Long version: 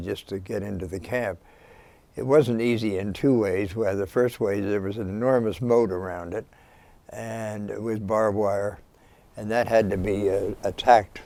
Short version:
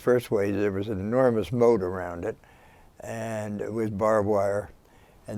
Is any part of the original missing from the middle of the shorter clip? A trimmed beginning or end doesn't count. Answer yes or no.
no